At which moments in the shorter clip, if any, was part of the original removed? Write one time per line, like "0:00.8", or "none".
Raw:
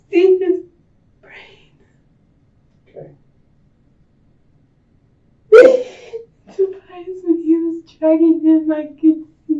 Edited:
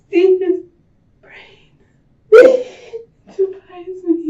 0:02.1